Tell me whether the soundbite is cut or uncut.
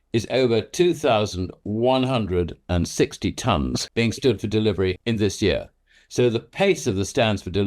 cut